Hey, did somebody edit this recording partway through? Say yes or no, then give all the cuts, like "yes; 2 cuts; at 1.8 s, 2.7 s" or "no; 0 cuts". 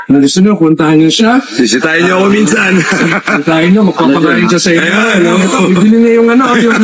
no; 0 cuts